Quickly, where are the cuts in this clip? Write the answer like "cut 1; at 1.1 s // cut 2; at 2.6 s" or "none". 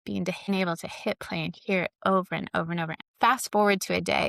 cut 1; at 3.0 s